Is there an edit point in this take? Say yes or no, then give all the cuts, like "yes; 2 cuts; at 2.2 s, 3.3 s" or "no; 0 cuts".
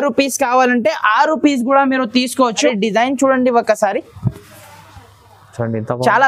yes; 1 cut; at 2.7 s